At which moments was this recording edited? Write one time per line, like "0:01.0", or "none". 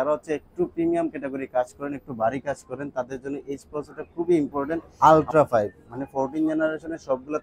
0:04.9